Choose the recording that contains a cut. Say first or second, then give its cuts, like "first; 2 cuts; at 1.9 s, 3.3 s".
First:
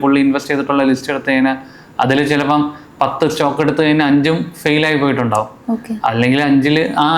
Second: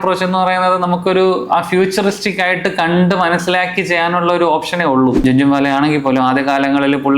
second; 1 cut; at 5.2 s